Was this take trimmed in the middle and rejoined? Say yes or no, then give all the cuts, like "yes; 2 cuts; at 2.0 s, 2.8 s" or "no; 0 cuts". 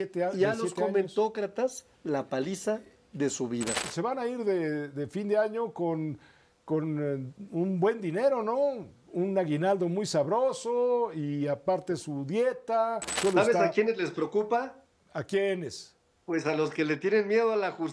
yes; 2 cuts; at 3.8 s, 13.1 s